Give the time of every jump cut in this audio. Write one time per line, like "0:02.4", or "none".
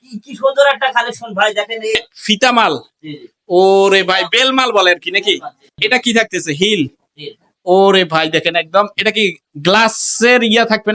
0:02.0
0:05.7